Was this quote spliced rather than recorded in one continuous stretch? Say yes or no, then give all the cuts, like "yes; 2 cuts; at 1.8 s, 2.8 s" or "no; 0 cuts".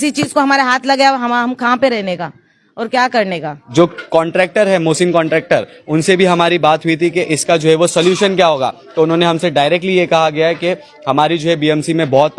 yes; 1 cut; at 3.5 s